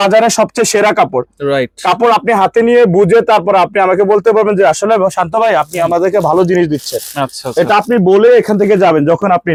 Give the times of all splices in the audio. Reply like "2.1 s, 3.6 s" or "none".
none